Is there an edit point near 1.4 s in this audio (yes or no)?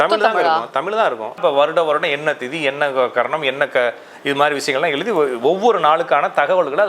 yes